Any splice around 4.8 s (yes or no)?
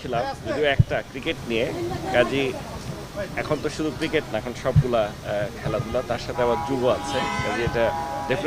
no